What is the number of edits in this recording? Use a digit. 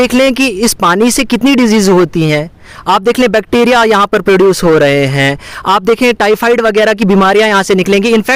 0